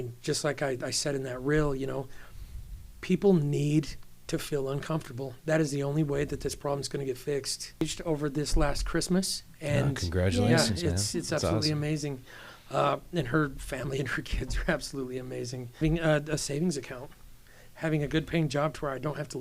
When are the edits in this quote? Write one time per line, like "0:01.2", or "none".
0:07.8
0:15.8